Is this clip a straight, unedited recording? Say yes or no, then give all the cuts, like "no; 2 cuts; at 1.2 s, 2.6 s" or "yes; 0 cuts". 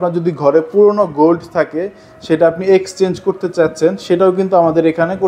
yes; 0 cuts